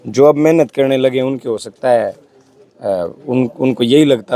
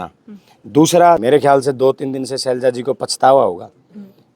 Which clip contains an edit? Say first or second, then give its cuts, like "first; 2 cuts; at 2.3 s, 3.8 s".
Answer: second; 1 cut; at 1.2 s